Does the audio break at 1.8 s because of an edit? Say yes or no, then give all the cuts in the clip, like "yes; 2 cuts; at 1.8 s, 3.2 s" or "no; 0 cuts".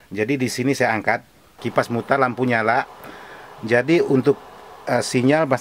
yes; 1 cut; at 1.8 s